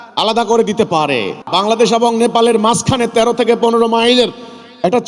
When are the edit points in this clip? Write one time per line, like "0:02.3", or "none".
0:01.4